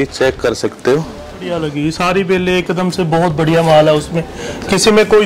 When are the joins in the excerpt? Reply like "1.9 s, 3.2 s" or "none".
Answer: 1.5 s